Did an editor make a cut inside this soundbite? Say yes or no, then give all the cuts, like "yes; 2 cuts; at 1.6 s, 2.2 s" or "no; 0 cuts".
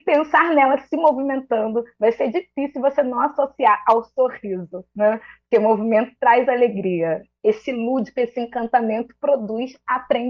no; 0 cuts